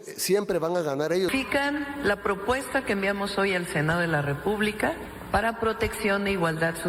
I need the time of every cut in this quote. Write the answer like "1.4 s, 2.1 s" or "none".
1.3 s, 5.1 s